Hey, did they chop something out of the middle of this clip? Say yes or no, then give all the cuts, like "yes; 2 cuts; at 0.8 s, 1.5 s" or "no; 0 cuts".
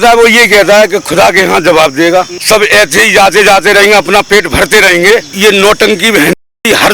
yes; 2 cuts; at 2.4 s, 5.3 s